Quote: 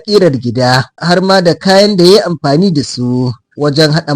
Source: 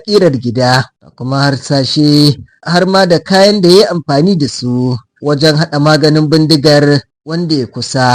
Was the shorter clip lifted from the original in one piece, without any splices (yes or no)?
no